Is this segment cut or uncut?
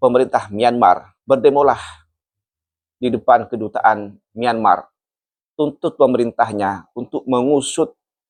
uncut